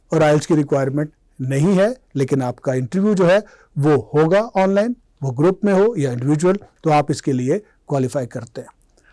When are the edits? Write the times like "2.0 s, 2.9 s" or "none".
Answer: none